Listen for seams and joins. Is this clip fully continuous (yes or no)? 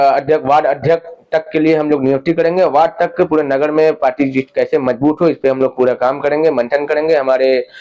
yes